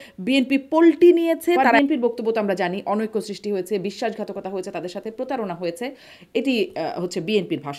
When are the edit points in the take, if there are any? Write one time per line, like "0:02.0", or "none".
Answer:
0:01.7